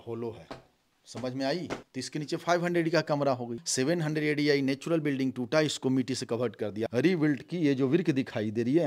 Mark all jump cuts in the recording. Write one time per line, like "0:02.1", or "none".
0:01.9
0:03.6
0:06.9